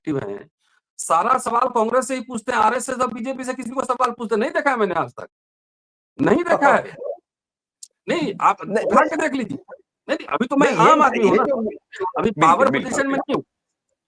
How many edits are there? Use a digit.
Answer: 0